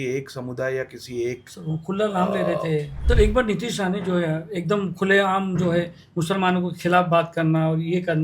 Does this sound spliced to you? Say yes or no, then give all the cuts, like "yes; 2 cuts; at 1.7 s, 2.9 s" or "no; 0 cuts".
yes; 1 cut; at 2.9 s